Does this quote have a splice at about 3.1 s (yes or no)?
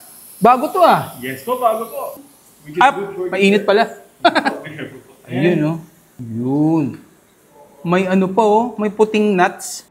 no